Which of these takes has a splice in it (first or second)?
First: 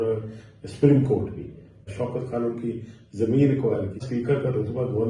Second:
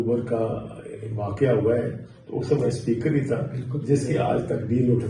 first